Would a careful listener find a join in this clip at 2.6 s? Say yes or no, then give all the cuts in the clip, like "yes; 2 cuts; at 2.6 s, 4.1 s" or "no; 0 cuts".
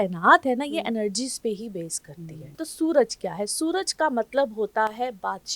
yes; 1 cut; at 2.6 s